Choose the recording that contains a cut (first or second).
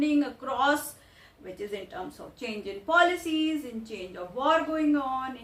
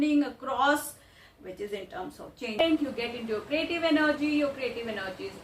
second